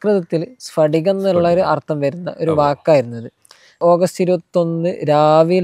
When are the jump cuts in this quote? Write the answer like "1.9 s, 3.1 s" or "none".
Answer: 3.8 s